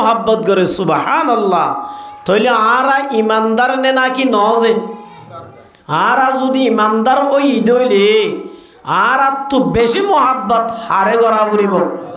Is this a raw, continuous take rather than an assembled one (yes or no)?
yes